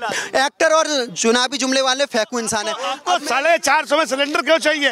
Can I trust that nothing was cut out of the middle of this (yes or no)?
no